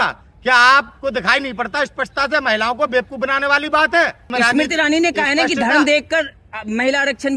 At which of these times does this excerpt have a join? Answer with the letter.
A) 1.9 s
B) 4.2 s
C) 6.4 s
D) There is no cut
B